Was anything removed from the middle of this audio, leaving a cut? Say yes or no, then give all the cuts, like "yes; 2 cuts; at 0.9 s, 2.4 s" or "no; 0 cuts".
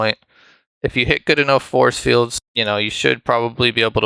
yes; 1 cut; at 2.4 s